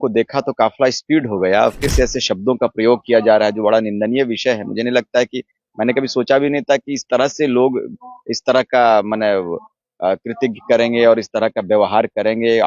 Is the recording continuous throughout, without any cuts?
no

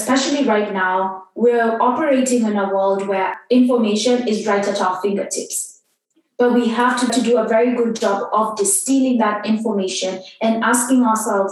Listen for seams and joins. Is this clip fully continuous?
no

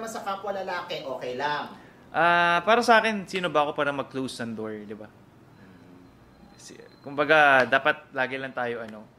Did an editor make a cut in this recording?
no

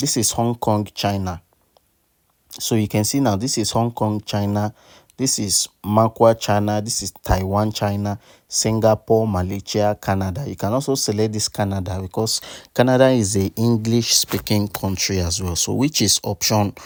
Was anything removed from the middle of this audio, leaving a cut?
no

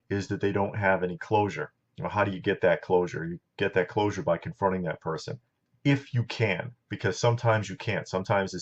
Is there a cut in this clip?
yes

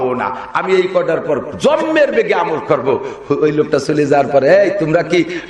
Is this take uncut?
yes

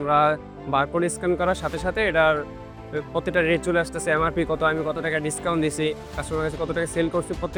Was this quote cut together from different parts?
no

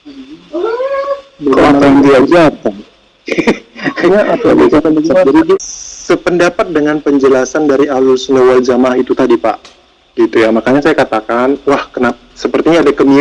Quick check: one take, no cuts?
no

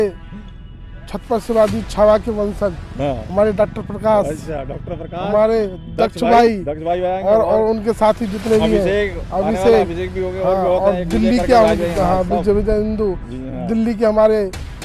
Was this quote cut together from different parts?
no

